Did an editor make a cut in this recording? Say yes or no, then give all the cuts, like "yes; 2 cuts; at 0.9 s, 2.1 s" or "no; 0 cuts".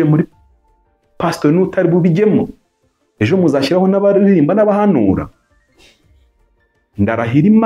no; 0 cuts